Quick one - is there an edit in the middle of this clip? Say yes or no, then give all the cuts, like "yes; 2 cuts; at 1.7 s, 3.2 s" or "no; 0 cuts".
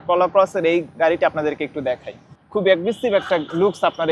yes; 1 cut; at 2.4 s